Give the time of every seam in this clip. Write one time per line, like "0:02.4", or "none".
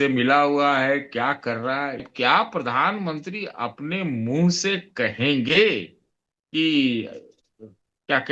0:02.0